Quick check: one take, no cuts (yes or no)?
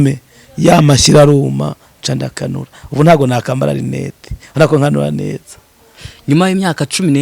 yes